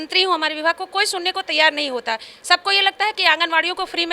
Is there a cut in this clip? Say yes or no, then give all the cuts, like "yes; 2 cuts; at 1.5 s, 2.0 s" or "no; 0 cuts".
no; 0 cuts